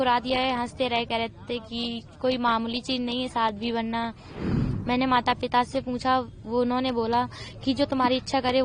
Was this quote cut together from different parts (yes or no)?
yes